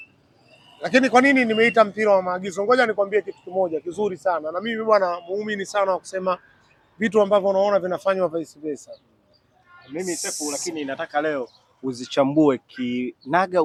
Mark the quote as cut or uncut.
uncut